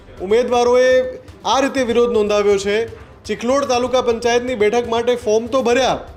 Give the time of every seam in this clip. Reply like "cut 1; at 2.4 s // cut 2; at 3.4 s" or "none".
none